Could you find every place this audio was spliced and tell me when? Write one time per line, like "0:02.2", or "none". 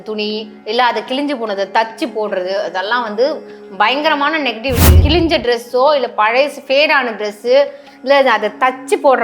0:05.0